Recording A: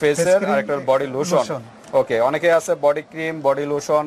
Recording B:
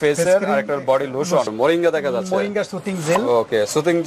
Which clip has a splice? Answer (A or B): B